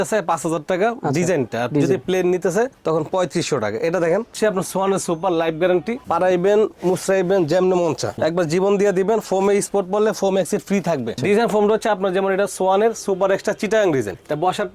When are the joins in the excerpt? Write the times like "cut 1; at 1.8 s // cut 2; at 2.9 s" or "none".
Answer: cut 1; at 4.3 s // cut 2; at 6.0 s // cut 3; at 8.2 s // cut 4; at 11.2 s